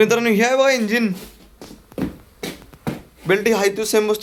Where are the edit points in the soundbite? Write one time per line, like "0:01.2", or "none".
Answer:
none